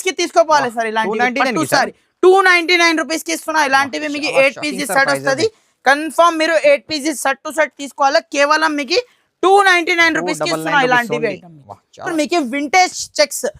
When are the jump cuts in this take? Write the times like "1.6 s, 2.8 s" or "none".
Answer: 12.1 s